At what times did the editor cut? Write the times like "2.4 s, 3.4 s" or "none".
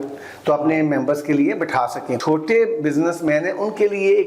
2.2 s